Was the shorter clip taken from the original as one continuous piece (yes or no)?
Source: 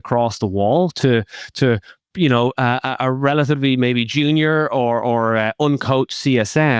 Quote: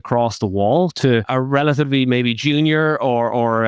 no